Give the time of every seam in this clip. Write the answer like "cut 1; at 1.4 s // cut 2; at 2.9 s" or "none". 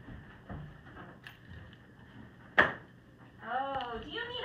none